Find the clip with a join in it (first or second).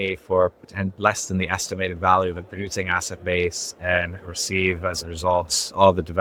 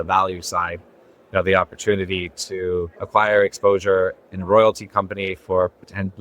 second